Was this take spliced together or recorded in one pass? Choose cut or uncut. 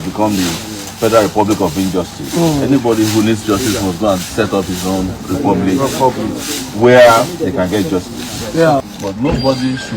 cut